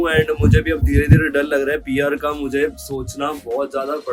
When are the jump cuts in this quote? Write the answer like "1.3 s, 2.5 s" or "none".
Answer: none